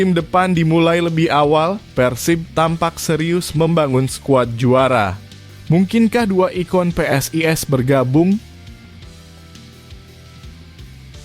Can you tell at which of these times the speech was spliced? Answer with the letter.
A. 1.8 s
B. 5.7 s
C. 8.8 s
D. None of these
C